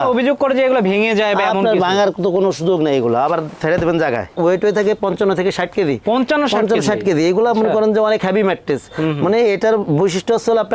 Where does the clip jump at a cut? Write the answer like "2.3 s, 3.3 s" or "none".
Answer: 4.4 s